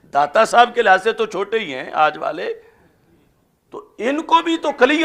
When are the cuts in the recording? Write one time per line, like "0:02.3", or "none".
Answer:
none